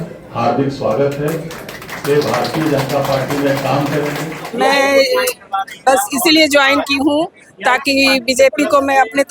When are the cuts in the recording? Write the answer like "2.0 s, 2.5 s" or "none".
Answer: 4.4 s